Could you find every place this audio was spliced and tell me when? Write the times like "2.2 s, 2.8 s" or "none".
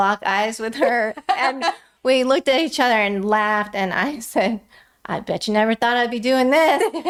none